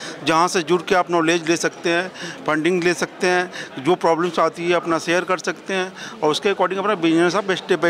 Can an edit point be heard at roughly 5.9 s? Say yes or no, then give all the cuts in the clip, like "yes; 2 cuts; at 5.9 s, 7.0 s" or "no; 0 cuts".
no; 0 cuts